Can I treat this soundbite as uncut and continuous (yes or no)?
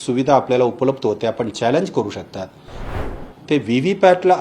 no